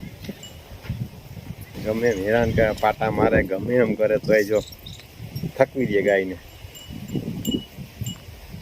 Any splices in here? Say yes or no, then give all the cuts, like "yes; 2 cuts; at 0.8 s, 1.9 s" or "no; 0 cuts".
yes; 1 cut; at 1.8 s